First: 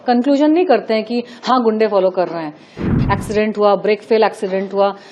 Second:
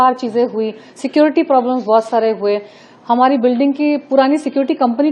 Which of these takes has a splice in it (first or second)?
first